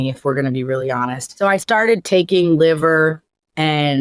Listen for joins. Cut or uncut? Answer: cut